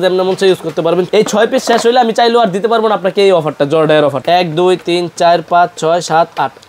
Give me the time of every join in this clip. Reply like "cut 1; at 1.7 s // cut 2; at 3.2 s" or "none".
cut 1; at 1.1 s // cut 2; at 4.2 s